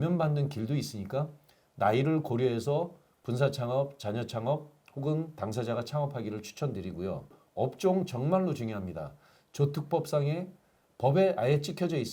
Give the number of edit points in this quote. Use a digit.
1